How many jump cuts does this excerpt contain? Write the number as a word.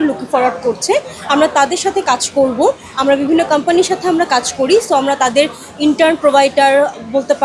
zero